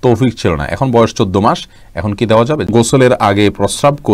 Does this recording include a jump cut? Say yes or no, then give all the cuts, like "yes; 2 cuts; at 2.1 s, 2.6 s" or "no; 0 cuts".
yes; 1 cut; at 2.7 s